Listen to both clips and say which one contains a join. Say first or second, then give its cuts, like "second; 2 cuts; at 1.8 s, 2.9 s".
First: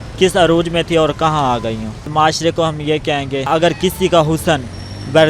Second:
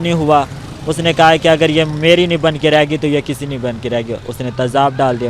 first; 2 cuts; at 2.1 s, 3.5 s